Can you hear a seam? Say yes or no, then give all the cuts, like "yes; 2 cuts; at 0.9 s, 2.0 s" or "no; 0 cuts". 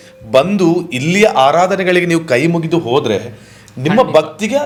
no; 0 cuts